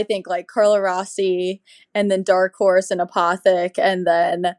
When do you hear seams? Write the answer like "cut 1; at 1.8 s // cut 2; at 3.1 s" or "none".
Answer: none